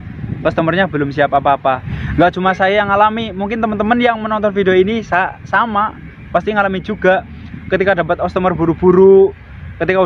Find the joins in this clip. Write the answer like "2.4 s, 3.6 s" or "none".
1.9 s